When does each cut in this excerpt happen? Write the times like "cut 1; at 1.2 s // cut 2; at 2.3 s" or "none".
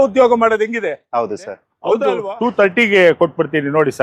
cut 1; at 2.1 s